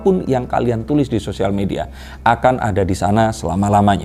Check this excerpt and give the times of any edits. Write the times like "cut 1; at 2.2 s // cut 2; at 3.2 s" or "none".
none